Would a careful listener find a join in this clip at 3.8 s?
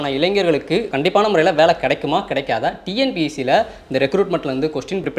no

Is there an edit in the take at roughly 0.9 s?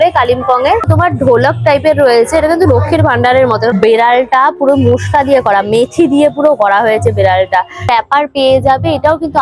yes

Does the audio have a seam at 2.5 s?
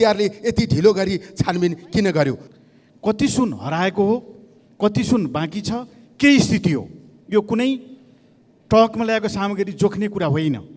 yes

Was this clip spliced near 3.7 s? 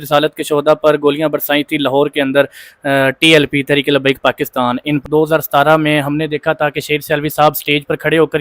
no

